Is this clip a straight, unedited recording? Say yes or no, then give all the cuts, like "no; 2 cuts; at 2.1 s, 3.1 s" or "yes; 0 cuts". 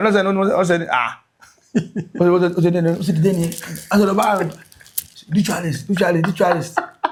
yes; 0 cuts